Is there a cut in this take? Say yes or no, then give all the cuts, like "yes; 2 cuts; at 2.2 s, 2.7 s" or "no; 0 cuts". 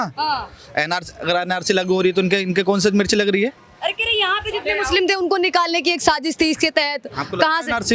no; 0 cuts